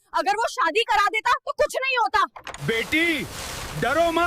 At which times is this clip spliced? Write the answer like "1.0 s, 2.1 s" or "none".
2.5 s